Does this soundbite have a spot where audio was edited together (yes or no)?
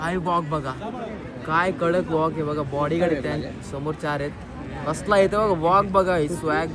no